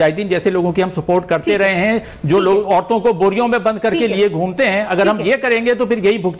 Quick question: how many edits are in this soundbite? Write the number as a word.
zero